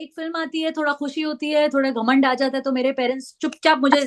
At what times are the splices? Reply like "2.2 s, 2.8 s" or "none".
none